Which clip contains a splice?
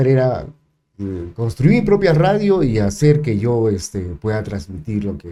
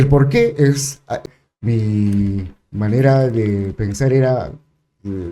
second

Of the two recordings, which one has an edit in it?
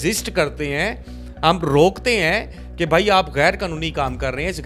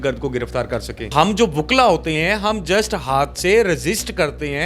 second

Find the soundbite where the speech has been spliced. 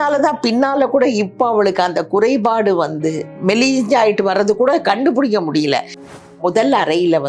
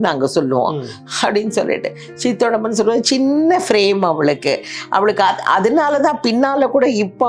first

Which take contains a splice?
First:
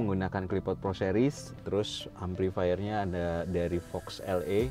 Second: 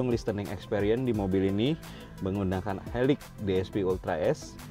first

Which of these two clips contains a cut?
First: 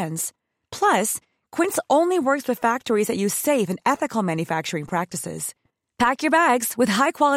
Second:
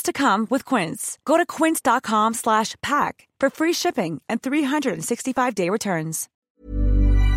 second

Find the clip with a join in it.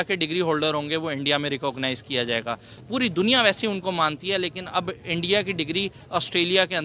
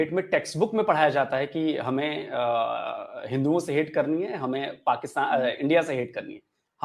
first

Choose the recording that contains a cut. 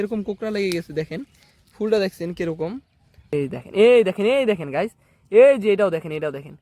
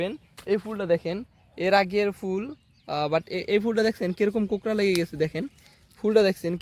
first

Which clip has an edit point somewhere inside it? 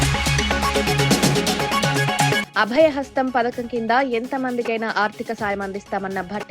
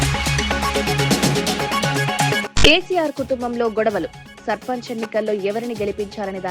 first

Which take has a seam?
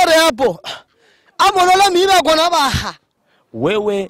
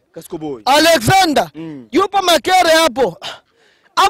first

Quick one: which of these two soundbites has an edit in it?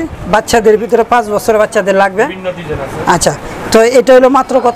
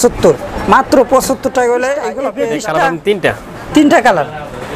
second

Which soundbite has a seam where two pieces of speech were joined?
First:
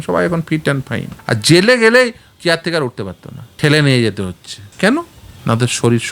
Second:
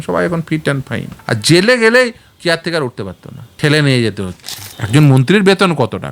second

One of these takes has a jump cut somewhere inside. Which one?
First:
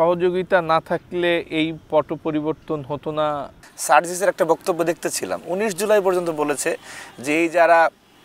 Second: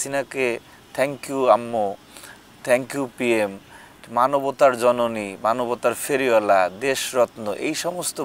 first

